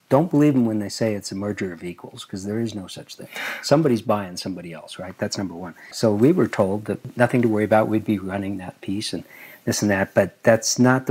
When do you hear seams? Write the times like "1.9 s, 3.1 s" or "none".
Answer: 5.9 s, 7.0 s